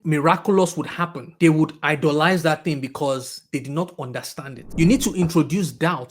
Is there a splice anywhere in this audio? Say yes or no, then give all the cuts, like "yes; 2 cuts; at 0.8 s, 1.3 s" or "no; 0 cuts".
yes; 1 cut; at 4.7 s